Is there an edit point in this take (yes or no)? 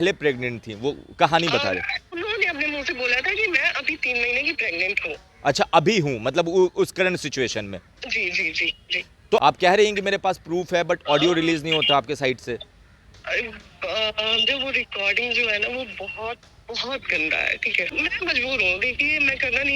yes